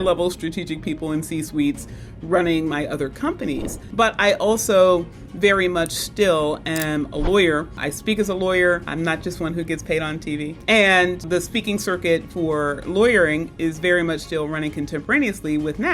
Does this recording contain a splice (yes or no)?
yes